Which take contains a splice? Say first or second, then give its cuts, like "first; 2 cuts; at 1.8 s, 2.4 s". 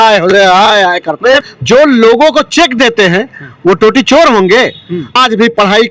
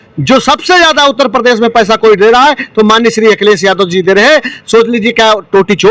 first; 2 cuts; at 1.4 s, 5.1 s